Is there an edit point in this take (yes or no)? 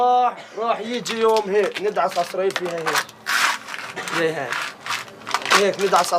yes